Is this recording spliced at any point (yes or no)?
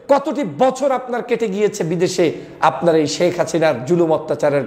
no